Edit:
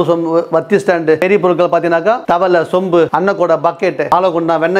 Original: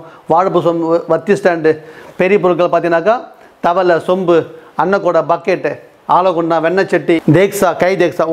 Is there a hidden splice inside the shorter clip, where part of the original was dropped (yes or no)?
yes